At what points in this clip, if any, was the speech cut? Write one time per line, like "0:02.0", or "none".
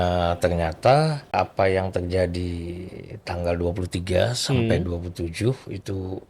0:01.3